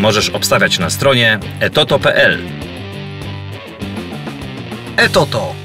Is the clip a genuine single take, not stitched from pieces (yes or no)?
yes